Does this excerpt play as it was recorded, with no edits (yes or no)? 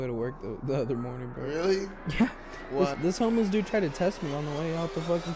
no